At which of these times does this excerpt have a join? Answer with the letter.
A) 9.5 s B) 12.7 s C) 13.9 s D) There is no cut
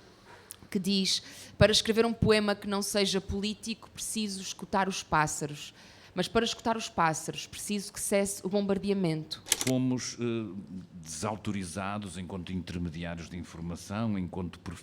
A